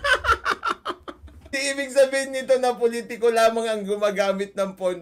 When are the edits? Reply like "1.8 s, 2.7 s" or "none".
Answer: 1.5 s

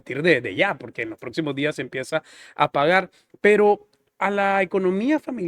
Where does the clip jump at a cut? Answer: none

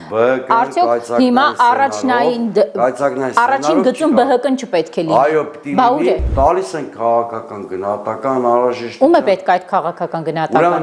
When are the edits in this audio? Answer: 6.3 s

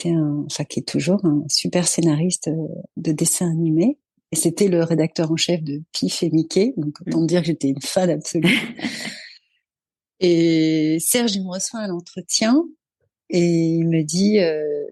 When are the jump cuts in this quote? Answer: none

